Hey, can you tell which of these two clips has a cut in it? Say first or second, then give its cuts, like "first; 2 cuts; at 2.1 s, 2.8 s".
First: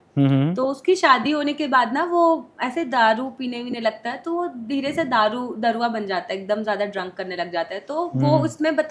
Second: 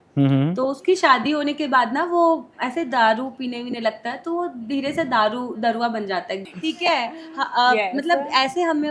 second; 1 cut; at 6.5 s